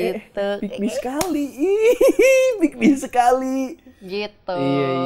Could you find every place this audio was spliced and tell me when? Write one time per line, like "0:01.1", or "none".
none